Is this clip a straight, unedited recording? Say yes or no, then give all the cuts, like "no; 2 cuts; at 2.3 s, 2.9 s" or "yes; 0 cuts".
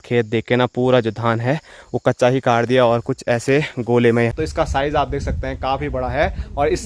no; 1 cut; at 4.3 s